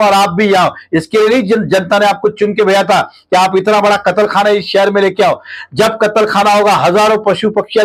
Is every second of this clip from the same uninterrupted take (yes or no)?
yes